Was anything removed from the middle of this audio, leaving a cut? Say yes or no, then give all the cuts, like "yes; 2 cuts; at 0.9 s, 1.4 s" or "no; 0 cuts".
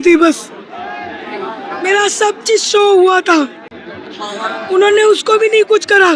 no; 0 cuts